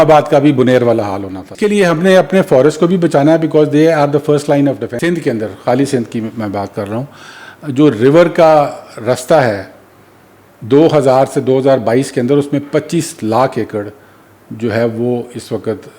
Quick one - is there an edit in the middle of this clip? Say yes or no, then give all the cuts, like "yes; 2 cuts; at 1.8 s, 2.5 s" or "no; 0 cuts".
yes; 2 cuts; at 1.5 s, 4.9 s